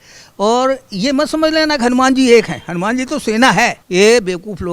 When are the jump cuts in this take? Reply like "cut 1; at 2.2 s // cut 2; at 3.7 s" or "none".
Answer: cut 1; at 3.8 s